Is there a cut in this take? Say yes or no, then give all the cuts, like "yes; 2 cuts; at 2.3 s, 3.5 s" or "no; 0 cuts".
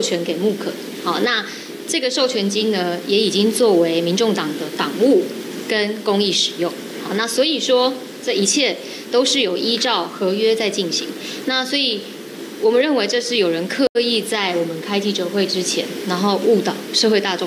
no; 0 cuts